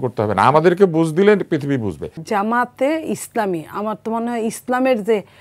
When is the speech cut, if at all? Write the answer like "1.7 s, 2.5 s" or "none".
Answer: 2.1 s